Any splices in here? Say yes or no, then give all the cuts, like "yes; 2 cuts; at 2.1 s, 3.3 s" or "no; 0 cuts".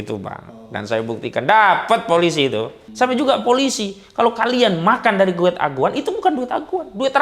yes; 1 cut; at 2.8 s